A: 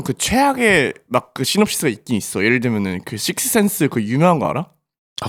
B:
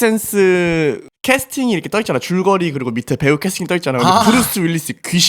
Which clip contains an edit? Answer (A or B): B